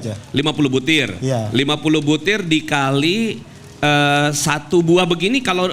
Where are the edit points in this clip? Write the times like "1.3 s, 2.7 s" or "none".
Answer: none